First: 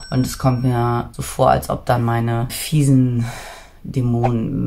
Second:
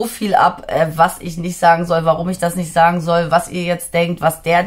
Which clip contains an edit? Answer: first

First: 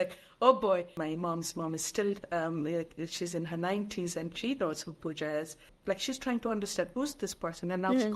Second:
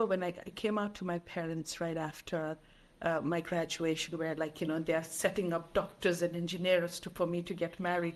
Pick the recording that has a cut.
first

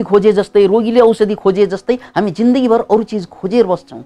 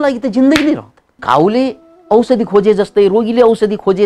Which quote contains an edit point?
second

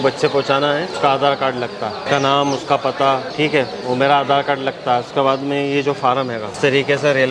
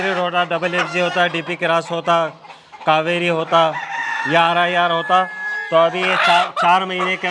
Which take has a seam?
first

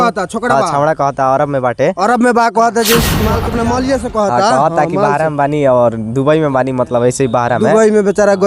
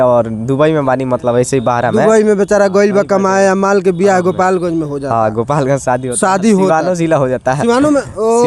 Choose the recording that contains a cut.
first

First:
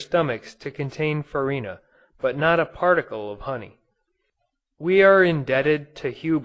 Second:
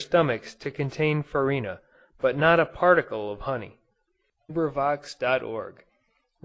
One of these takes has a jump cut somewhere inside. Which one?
first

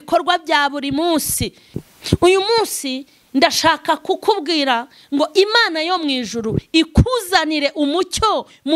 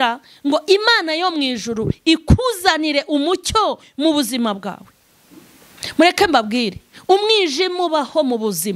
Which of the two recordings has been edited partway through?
first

